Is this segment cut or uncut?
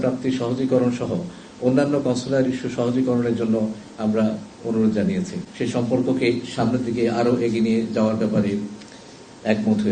cut